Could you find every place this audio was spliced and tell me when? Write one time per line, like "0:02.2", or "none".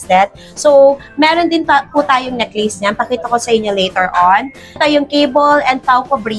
0:04.8